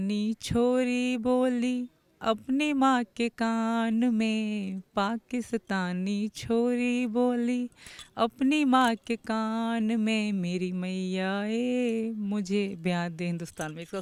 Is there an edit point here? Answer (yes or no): no